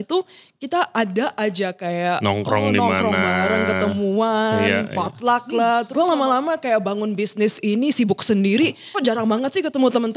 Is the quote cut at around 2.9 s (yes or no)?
no